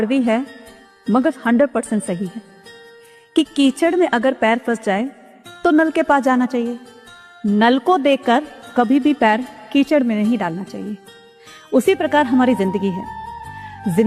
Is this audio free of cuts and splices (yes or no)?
yes